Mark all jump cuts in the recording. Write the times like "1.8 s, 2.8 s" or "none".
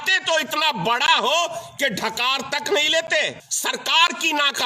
3.5 s